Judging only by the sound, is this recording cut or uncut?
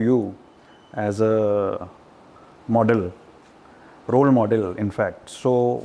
uncut